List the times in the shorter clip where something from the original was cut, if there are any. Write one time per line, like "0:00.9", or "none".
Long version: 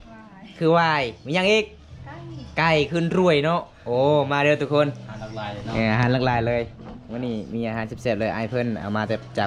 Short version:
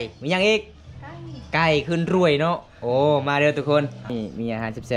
0:04.0